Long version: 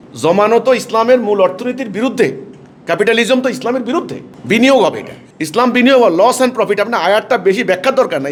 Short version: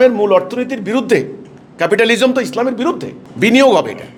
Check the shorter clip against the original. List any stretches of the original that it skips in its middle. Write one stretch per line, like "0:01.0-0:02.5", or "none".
none

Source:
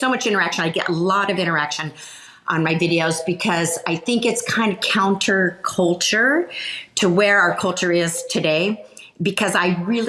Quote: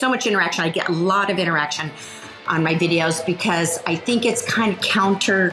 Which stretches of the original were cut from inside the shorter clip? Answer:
none

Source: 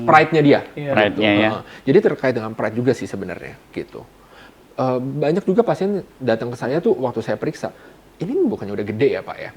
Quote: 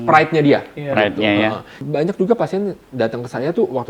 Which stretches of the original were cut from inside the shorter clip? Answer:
0:01.8-0:05.1

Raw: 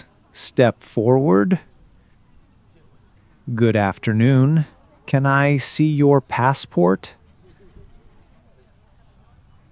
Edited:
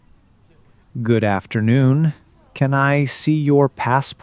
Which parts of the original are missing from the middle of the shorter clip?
0:03.2-0:03.4

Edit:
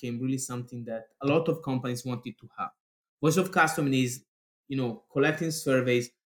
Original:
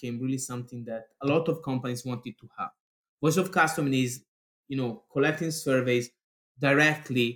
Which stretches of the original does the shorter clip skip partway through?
none

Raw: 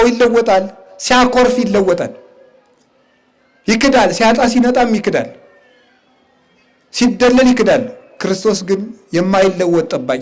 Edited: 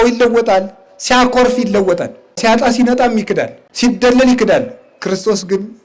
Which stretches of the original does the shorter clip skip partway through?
0:02.4-0:04.1
0:05.4-0:06.8

